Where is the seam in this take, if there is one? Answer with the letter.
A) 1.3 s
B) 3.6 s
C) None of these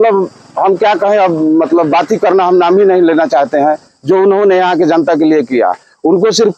C